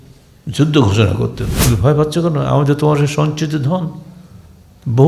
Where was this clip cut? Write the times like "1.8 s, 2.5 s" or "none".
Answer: 1.5 s

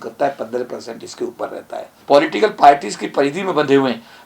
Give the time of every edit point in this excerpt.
1.9 s

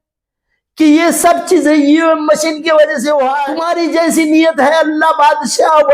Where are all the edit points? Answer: 3.6 s

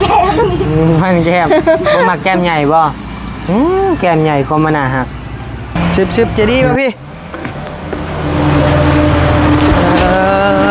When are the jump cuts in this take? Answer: 5.7 s

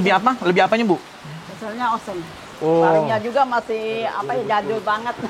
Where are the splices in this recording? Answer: 2.4 s

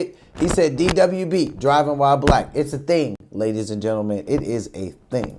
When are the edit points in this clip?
none

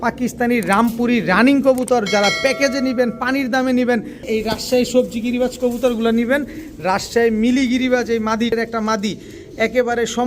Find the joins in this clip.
4.2 s, 8.5 s

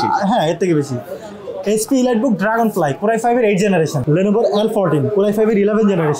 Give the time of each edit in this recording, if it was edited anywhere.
4.0 s

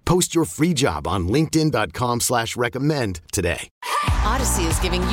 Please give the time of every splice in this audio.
3.7 s

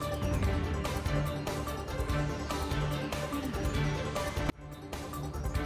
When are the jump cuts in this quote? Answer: 1.5 s, 3.0 s

